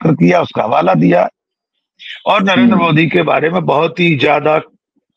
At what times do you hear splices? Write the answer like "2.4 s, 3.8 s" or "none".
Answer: none

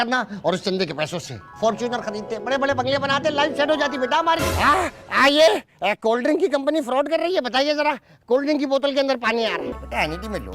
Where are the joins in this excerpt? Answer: 4.4 s, 9.7 s

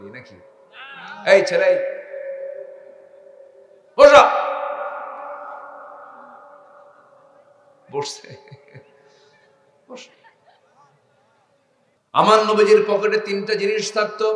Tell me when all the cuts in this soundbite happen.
12.0 s

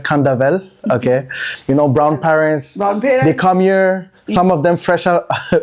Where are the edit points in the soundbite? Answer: 1.5 s

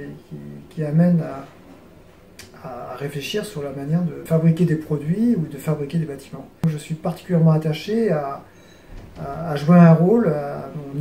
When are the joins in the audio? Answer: 4.2 s, 6.6 s

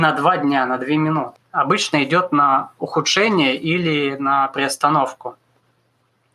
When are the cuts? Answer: 1.3 s

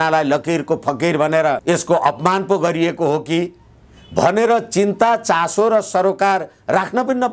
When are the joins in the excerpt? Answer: none

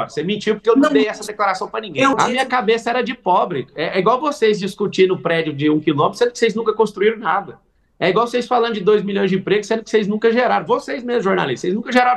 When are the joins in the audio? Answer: 2.2 s

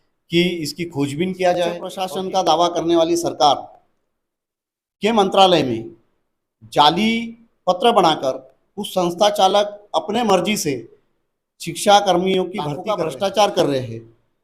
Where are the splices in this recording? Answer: 1.9 s, 12.8 s

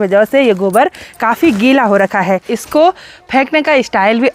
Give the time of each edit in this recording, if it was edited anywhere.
2.5 s

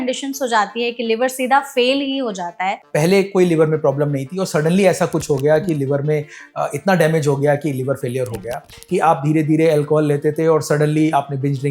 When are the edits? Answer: 2.8 s, 8.7 s

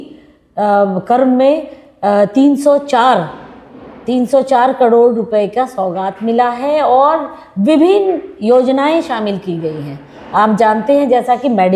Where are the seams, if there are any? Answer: none

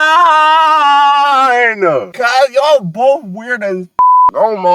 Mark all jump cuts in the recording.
2.2 s

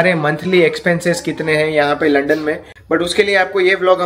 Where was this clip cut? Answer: 2.7 s

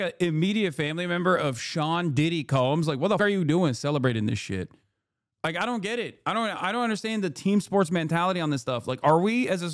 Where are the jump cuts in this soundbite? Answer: 3.2 s

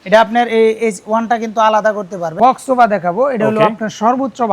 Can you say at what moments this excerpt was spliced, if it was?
2.4 s

